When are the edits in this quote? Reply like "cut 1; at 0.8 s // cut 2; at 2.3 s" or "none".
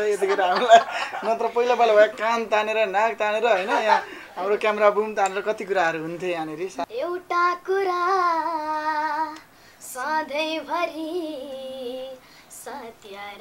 cut 1; at 6.9 s